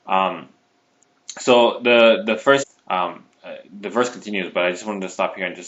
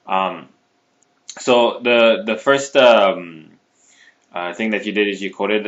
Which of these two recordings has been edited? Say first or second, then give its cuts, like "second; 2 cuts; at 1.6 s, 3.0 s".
second; 1 cut; at 2.7 s